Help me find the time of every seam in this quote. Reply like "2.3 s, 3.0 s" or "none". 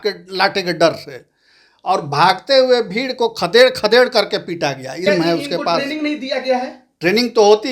5.0 s